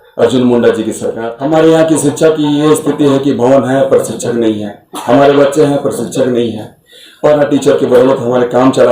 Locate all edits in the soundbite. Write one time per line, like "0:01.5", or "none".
0:01.1